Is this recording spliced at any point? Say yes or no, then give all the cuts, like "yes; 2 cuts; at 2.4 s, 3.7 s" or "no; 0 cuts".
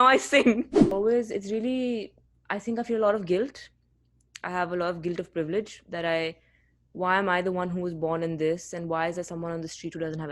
yes; 1 cut; at 0.9 s